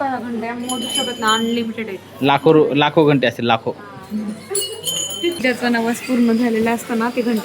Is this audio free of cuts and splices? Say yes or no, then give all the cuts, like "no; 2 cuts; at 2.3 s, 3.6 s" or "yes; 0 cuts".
no; 1 cut; at 5.4 s